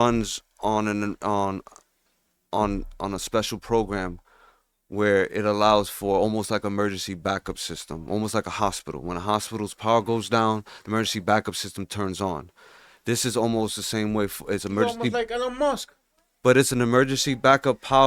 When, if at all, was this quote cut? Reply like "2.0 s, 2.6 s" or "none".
none